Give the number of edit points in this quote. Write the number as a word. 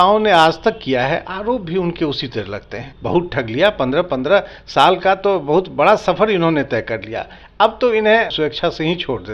two